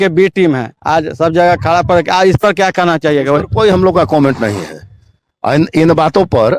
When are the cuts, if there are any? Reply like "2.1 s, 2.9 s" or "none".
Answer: none

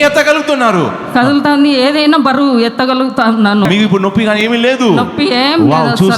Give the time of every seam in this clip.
3.6 s

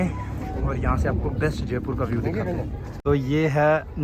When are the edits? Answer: 2.9 s

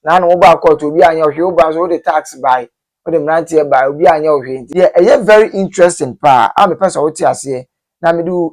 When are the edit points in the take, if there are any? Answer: 4.6 s

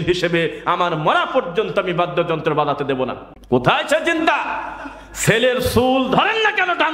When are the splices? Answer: 3.3 s

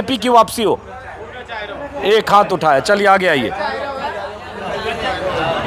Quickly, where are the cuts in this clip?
none

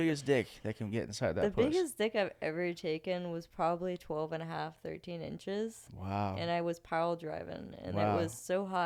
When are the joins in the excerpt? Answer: none

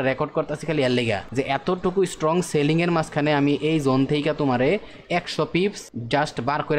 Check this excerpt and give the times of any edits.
1.2 s, 5.9 s

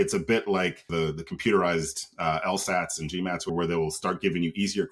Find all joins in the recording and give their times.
0.9 s, 3.5 s

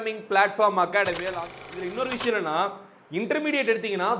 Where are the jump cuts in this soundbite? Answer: 1.4 s

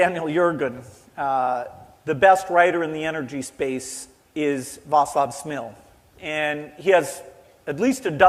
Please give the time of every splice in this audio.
none

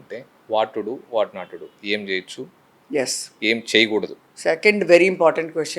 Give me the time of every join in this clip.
none

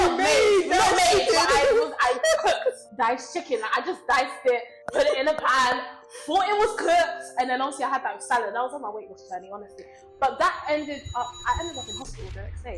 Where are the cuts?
2.9 s, 4.8 s

